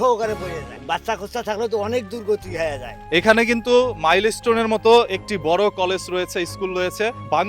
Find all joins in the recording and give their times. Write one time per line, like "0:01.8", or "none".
0:02.9